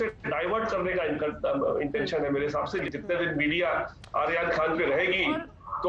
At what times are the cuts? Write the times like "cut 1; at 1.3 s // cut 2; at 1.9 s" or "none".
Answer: cut 1; at 2.8 s